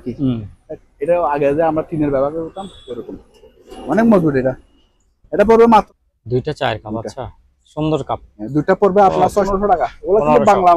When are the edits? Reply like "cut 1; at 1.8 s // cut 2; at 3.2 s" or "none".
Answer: cut 1; at 5.9 s // cut 2; at 9.5 s